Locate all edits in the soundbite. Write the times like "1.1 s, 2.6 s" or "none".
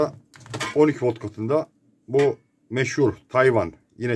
none